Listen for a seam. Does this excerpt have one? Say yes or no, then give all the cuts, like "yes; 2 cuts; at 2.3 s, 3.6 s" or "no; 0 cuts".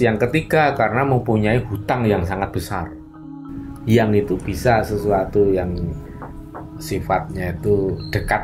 yes; 1 cut; at 3.4 s